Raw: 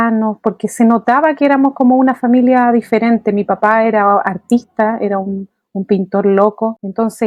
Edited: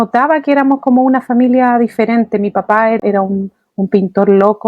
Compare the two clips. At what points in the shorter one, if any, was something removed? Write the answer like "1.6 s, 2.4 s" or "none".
3.0 s